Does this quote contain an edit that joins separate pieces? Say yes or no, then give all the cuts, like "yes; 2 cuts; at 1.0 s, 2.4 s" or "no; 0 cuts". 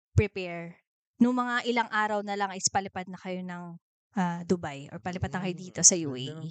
no; 0 cuts